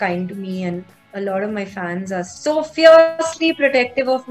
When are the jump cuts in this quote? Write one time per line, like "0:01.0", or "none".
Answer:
0:02.3